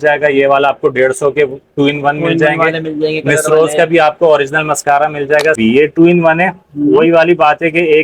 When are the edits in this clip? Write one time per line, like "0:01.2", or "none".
0:05.6